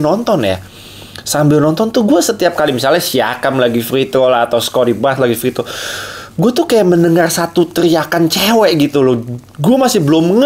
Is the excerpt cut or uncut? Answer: uncut